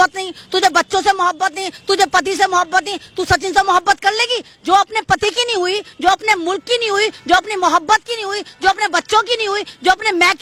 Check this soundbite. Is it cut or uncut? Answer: uncut